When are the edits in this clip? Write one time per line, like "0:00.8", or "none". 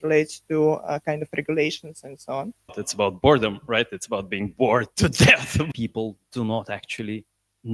0:02.8
0:05.7